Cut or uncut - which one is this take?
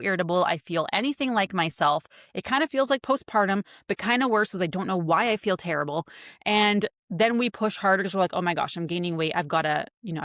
uncut